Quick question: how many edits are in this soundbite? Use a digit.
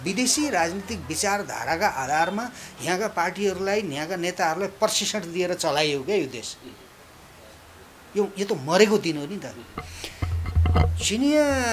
0